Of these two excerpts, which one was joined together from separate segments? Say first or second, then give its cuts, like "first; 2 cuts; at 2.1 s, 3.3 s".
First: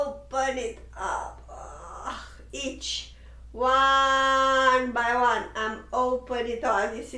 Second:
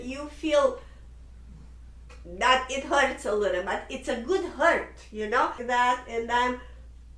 second; 1 cut; at 5.6 s